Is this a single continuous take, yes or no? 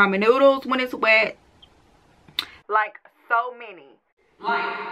yes